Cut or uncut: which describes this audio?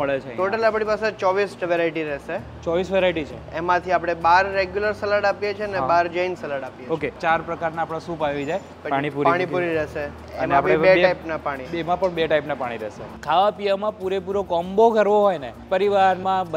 cut